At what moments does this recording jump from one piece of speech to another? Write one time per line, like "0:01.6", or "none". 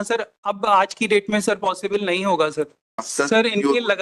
0:03.1